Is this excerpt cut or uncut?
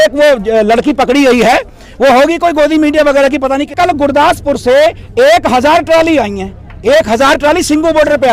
cut